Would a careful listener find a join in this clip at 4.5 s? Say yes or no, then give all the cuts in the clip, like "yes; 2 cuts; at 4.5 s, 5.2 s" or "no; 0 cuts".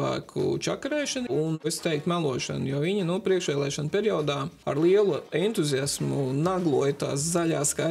no; 1 cut; at 1.5 s